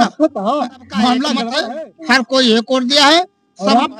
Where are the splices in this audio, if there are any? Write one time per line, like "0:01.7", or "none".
0:01.5